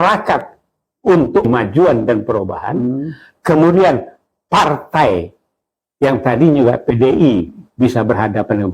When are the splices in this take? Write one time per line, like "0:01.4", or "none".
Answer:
0:01.4